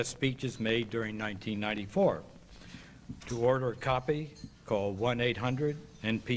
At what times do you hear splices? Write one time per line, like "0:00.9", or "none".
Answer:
none